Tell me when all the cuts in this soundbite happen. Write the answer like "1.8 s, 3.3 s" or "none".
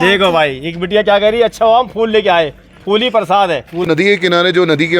3.9 s